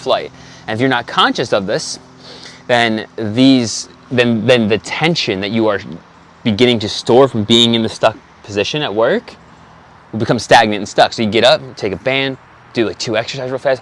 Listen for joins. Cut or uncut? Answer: uncut